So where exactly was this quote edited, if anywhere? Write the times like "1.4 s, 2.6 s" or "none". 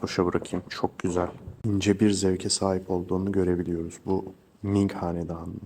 1.5 s